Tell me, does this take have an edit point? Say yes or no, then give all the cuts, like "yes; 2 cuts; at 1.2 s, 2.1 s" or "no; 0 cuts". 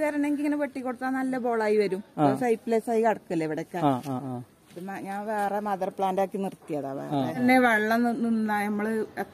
yes; 1 cut; at 7.4 s